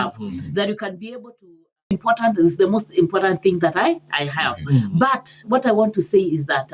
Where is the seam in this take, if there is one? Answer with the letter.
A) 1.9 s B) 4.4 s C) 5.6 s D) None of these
A